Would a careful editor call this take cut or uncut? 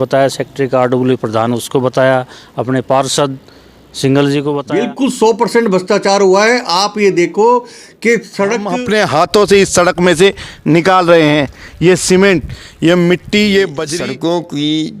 cut